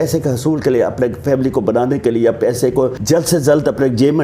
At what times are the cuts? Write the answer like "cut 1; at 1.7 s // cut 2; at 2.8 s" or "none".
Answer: cut 1; at 3.0 s